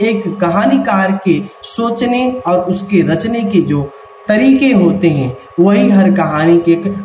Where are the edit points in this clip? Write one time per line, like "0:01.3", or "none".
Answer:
none